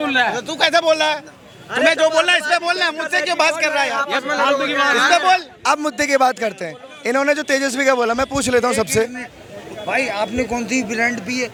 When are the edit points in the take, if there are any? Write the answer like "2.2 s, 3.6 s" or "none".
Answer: none